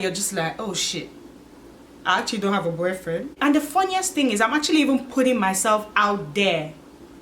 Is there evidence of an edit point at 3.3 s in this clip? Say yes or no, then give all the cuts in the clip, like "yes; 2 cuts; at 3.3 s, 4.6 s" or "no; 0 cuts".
yes; 1 cut; at 3.3 s